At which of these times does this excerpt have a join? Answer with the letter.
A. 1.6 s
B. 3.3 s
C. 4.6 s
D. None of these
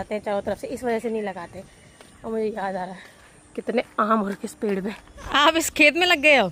D